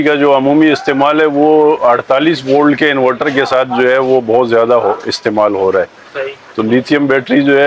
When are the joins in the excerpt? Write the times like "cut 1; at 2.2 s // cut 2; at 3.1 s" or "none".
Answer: none